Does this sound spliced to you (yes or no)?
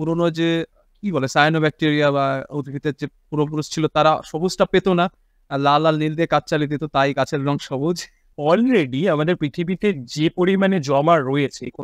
yes